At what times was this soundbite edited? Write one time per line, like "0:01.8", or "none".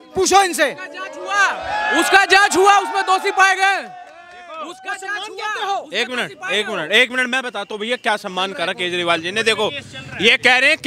none